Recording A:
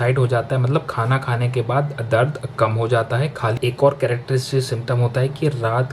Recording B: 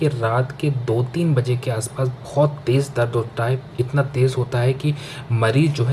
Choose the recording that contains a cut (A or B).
A